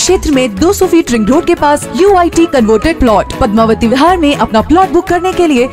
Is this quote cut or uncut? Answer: uncut